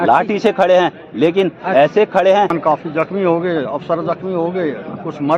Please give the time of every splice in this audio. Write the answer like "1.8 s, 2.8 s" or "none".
2.6 s